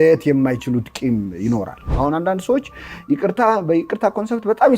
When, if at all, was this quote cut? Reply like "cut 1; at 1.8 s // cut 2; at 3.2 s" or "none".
cut 1; at 1.9 s